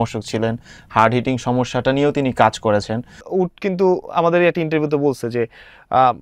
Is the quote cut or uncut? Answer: cut